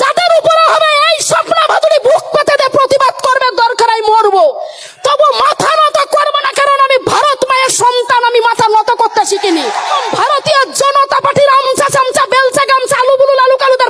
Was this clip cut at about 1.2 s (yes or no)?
no